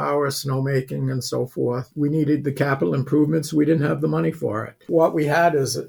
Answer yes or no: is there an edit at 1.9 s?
yes